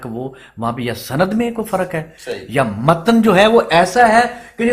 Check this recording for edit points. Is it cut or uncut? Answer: uncut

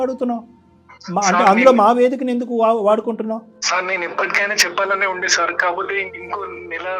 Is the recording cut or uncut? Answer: cut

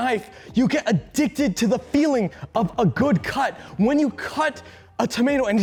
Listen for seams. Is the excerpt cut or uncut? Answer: uncut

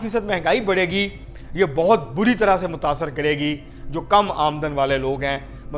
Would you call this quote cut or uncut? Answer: uncut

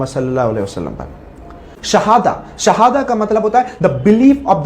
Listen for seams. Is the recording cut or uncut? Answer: cut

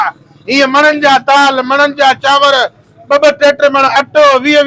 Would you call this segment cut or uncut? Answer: uncut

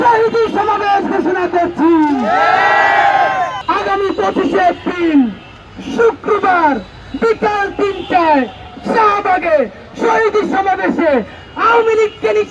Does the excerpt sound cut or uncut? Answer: cut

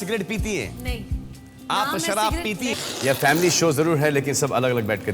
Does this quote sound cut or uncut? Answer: cut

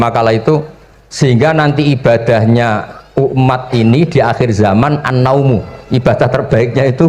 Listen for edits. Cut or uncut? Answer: uncut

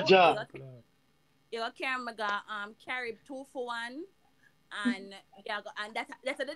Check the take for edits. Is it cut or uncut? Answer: uncut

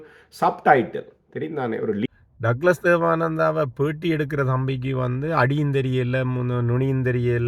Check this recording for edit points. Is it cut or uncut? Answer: cut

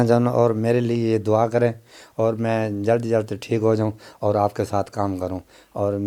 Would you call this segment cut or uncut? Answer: uncut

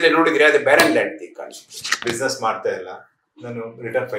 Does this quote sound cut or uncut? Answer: cut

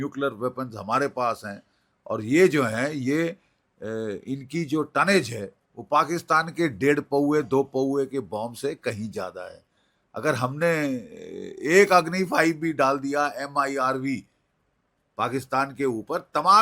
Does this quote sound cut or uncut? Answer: uncut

